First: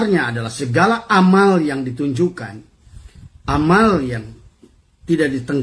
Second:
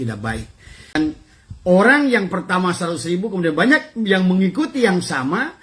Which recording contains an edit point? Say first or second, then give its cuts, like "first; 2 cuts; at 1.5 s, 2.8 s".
second; 1 cut; at 1.0 s